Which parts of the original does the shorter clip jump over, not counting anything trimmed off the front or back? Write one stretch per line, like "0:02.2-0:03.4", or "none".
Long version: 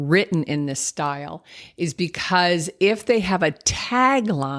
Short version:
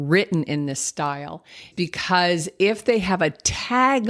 0:01.7-0:01.9